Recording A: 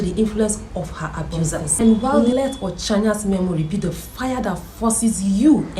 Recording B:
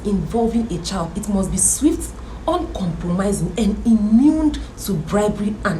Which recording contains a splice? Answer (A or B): A